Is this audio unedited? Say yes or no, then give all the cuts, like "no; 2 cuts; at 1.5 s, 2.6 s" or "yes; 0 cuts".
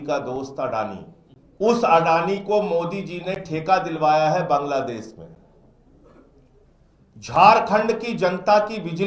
yes; 0 cuts